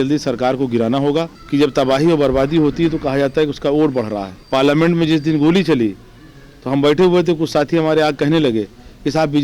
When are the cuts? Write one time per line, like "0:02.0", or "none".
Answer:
0:01.4
0:04.3